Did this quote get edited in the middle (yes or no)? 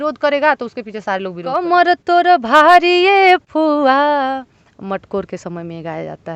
yes